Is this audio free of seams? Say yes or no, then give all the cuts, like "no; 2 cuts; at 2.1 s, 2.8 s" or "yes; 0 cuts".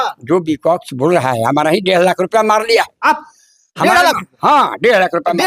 yes; 0 cuts